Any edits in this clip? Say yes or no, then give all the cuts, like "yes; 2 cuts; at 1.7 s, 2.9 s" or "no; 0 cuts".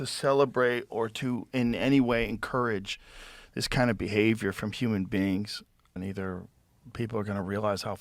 yes; 1 cut; at 5.9 s